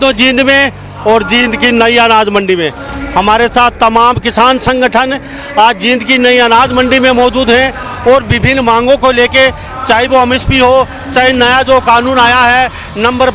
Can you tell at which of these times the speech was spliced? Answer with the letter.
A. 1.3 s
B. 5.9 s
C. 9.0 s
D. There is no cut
D